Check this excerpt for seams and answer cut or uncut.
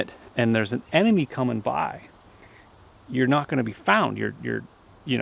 uncut